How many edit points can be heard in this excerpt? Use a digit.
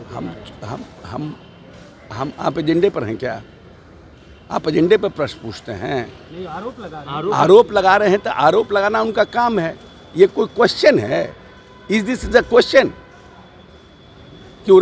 0